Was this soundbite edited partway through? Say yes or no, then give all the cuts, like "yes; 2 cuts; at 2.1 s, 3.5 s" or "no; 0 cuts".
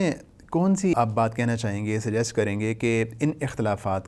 yes; 1 cut; at 0.9 s